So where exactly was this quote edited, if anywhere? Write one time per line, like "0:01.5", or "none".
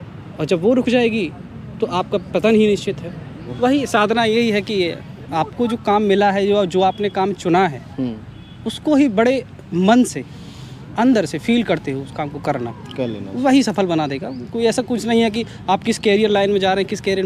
0:03.5